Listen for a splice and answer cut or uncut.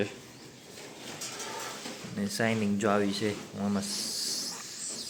uncut